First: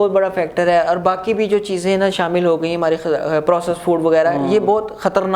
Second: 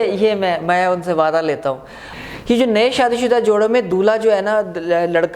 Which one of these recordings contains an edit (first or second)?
second